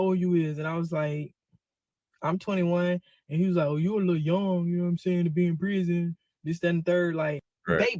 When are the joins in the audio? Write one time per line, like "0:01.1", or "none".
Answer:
none